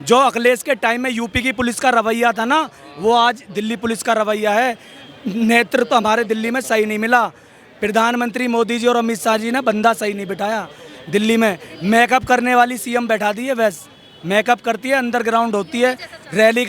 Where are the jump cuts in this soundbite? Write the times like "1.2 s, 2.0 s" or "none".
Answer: none